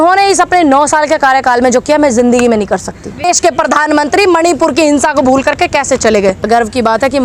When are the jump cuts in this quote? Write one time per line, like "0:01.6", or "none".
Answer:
0:03.2
0:06.5